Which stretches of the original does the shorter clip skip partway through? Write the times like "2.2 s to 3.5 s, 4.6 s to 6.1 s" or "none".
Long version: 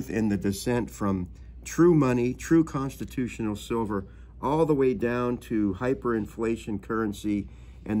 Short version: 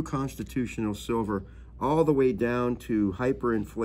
none